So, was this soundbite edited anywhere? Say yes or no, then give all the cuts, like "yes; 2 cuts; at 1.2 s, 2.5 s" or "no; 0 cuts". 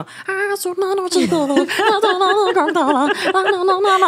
no; 0 cuts